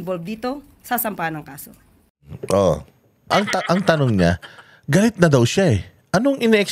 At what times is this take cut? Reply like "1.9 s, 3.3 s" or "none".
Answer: 3.3 s